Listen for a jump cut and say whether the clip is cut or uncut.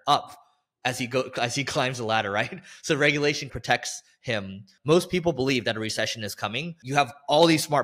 cut